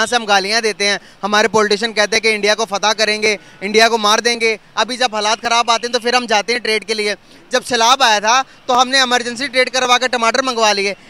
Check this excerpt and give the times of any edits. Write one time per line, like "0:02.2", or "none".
none